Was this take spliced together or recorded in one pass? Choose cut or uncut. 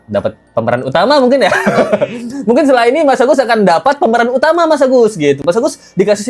uncut